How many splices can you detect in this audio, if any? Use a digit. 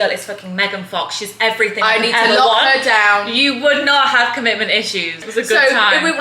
1